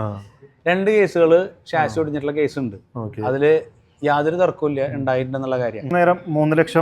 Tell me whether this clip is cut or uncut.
cut